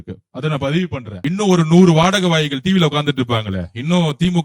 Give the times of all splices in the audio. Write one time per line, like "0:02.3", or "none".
0:01.1